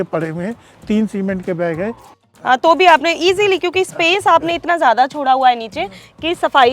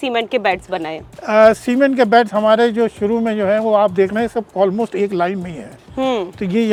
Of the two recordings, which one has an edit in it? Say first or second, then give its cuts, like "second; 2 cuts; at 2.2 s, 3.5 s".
first; 1 cut; at 2.0 s